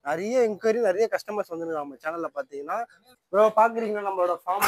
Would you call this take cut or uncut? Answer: cut